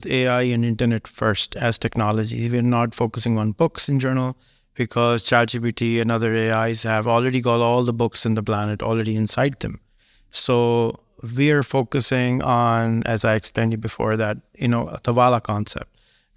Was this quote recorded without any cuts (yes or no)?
yes